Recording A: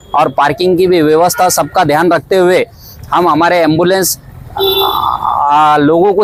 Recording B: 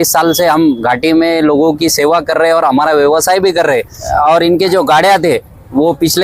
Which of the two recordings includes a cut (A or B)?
B